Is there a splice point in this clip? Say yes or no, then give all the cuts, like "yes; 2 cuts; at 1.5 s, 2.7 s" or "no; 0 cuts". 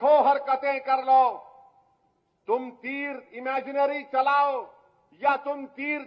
no; 0 cuts